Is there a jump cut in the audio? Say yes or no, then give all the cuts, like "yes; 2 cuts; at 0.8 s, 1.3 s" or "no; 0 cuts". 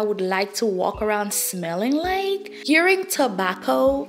yes; 1 cut; at 2.5 s